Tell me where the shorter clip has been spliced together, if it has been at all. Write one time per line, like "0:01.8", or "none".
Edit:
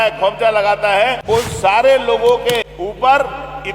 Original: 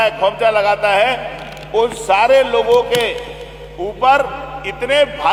0:01.2
0:02.7